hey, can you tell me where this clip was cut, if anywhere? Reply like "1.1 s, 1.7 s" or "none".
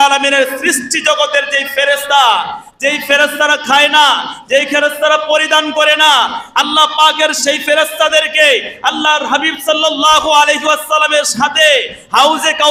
none